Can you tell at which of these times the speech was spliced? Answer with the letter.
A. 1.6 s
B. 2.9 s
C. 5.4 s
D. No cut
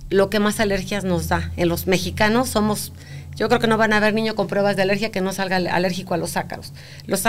D